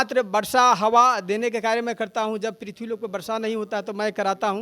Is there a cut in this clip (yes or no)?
no